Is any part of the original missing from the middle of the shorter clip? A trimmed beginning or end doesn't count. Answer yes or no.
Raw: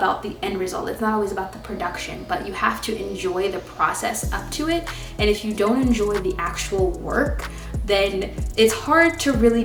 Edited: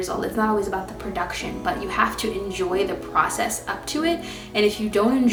no